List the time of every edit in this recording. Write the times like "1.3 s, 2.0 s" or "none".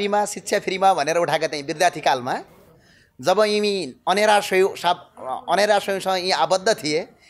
none

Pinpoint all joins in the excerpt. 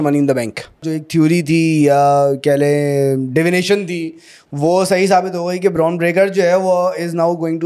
0.9 s

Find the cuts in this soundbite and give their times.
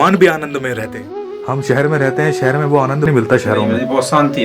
1.0 s, 3.1 s

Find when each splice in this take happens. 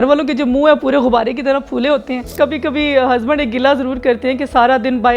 2.3 s

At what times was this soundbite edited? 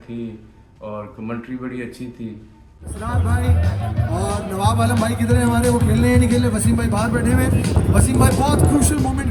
none

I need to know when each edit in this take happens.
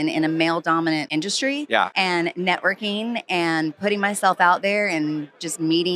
1.1 s, 1.9 s

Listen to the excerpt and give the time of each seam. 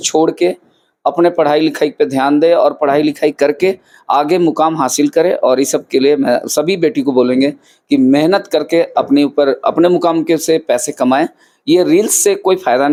none

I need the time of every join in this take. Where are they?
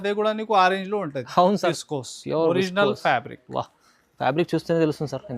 1.8 s

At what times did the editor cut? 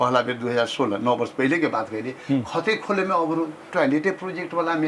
3.7 s

